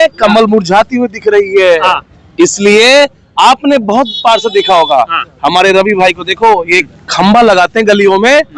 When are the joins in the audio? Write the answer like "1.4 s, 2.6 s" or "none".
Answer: none